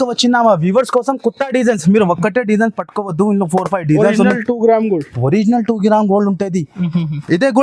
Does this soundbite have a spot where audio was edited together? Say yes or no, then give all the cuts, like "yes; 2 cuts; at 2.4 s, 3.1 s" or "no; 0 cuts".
no; 0 cuts